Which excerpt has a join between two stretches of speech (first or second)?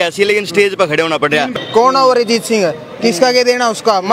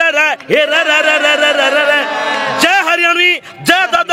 first